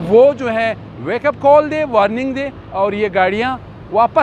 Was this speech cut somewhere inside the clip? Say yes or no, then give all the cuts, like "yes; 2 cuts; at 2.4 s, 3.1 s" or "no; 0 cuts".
no; 0 cuts